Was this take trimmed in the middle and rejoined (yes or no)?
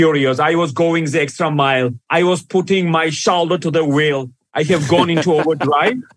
yes